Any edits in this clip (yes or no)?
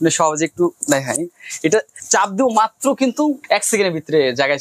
yes